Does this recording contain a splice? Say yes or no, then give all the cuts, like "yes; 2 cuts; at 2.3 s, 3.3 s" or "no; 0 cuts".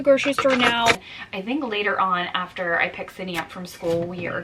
yes; 1 cut; at 1.0 s